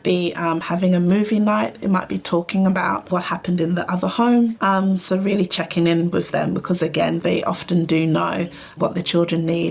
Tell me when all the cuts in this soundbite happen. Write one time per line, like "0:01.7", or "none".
0:03.1
0:07.2

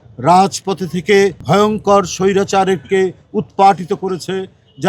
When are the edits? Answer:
0:01.4

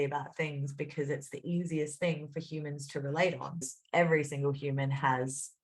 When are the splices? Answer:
0:03.8

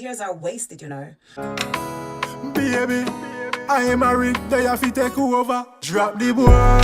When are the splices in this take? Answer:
0:01.4

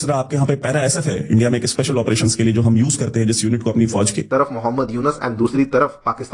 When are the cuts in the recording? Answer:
0:04.3

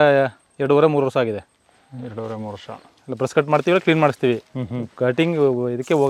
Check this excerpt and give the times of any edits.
none

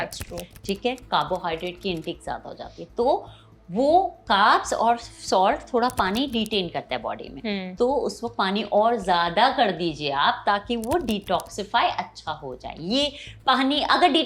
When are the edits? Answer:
none

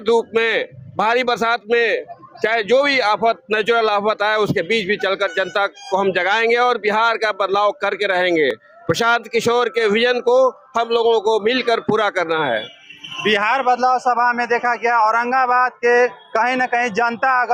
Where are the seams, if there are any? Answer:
none

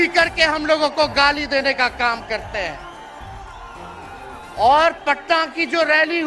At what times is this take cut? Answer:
none

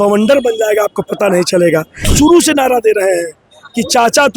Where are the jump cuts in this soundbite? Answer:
0:02.1

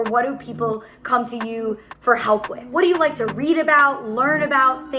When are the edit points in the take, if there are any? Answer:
0:02.6

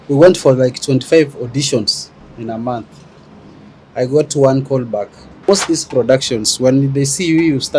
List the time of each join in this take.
0:05.5

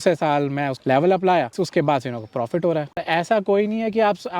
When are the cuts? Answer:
0:01.6
0:03.0

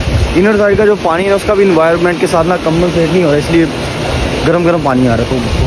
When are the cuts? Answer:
none

